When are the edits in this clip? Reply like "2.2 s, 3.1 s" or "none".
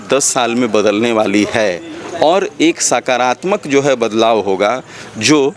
none